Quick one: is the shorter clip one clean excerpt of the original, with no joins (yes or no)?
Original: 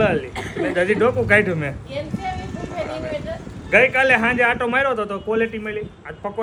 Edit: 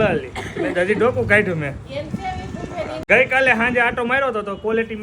no